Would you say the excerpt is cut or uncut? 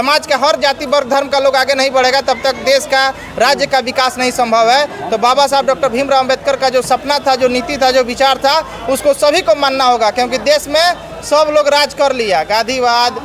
uncut